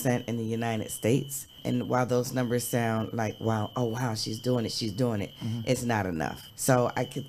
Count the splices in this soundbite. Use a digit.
0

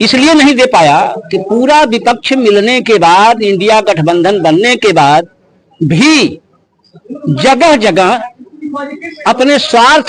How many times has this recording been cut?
0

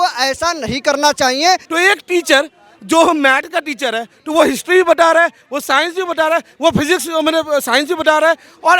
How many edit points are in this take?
1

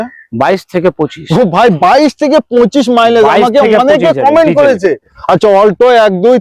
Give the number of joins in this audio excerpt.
1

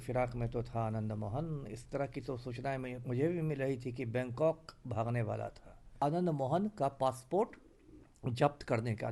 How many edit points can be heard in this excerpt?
1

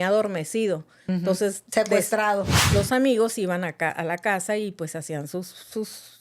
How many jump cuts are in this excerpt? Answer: 1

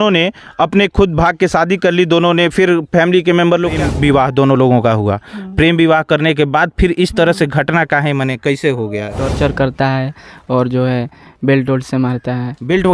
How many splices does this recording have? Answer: 2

